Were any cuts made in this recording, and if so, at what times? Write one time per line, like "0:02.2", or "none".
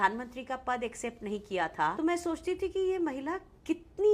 0:02.0